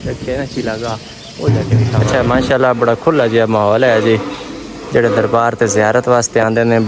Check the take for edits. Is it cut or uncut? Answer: cut